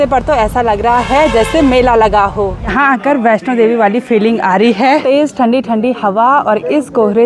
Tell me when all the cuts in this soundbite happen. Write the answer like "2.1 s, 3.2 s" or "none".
2.6 s, 5.0 s